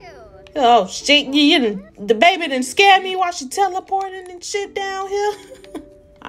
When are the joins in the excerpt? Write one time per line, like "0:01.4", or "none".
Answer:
none